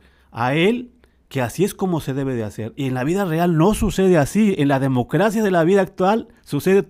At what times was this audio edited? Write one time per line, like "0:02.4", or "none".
none